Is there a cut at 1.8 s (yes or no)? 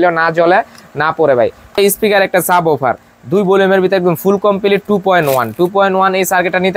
yes